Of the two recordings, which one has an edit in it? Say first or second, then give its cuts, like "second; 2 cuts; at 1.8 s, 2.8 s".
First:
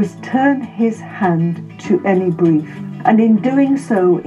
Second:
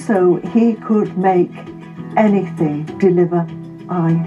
first; 1 cut; at 2.8 s